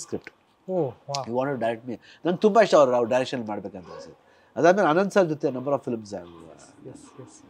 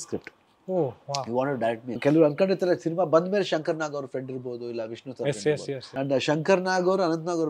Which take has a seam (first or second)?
second